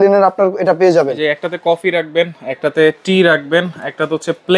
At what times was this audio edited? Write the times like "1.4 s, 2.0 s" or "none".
none

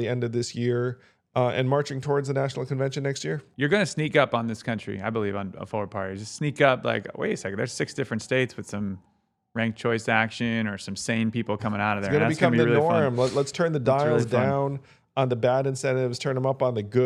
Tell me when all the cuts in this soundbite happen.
3.5 s

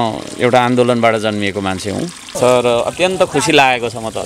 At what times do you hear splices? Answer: 2.4 s

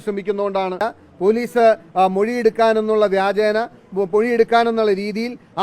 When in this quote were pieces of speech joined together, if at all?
0.9 s

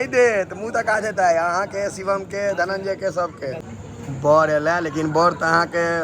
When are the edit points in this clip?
3.7 s

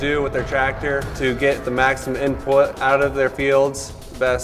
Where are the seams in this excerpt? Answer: none

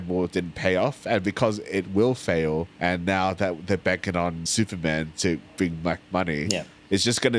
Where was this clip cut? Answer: 2.7 s, 4.4 s

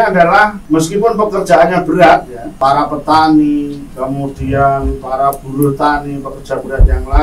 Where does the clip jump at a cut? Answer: 2.5 s

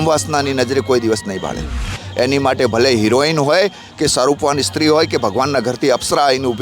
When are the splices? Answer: 2.0 s

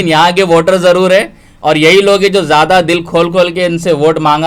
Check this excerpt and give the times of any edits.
none

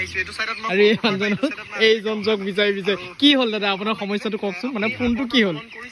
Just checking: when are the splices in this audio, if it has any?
none

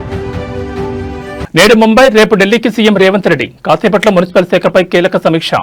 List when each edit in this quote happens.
none

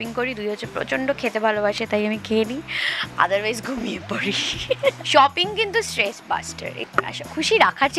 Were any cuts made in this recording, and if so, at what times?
5.0 s, 6.8 s

